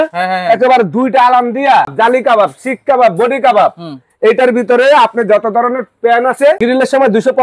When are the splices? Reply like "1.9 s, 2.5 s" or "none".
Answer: 1.9 s, 6.6 s